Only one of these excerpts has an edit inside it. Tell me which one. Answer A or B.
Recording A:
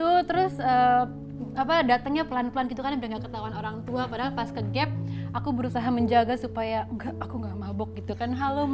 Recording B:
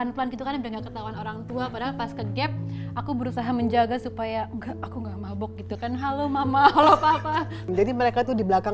B